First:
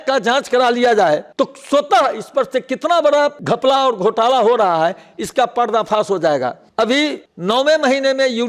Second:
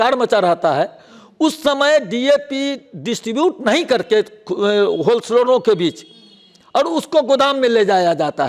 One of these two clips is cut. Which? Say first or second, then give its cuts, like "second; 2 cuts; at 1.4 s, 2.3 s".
first; 3 cuts; at 1.3 s, 3.4 s, 7.1 s